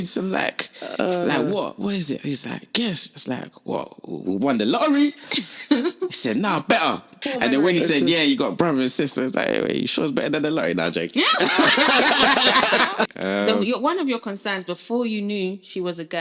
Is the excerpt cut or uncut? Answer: cut